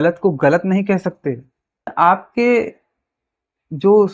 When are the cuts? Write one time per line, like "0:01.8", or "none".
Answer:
0:01.9